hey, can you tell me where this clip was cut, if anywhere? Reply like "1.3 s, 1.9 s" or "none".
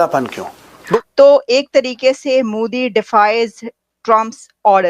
1.0 s